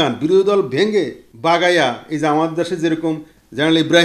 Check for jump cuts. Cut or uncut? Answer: cut